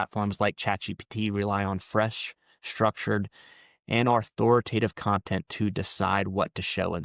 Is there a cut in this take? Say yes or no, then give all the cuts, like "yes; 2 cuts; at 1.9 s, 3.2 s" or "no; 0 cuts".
no; 0 cuts